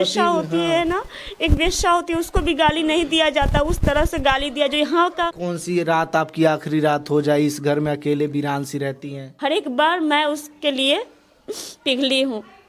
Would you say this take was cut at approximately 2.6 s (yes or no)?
no